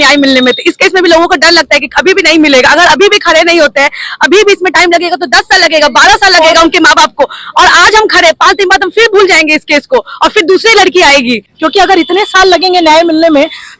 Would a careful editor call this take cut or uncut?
cut